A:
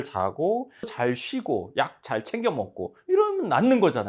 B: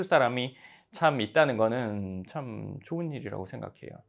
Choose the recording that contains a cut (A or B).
A